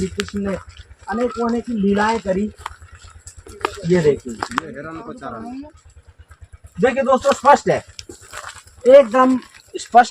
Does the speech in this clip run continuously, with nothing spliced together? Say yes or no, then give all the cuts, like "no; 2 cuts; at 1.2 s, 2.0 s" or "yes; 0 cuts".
yes; 0 cuts